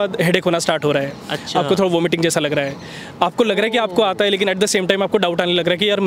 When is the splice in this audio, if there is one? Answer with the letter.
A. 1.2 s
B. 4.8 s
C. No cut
C